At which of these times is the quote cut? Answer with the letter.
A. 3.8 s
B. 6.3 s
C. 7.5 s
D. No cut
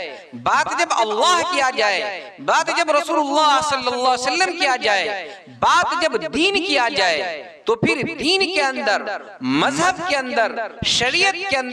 D